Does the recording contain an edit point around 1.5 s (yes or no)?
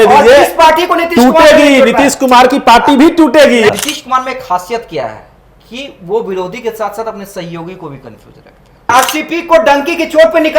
no